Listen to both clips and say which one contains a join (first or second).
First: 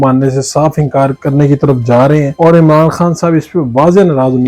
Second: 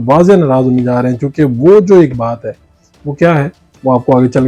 first